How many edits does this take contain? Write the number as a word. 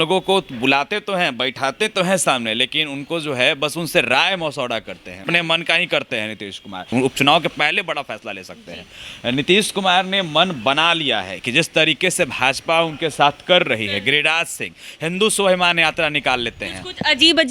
two